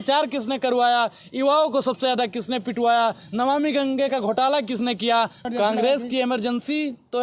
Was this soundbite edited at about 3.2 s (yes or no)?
no